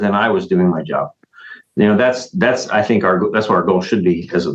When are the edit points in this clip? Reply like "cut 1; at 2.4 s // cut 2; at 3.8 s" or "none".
none